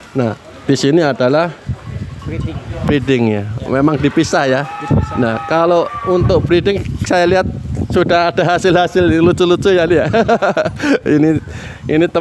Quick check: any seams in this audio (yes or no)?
no